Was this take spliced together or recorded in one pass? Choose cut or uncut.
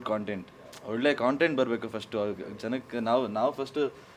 uncut